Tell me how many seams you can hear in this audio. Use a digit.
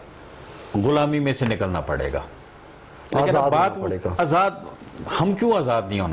0